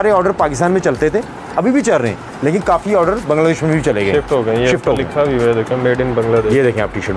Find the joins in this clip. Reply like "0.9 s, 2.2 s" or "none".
none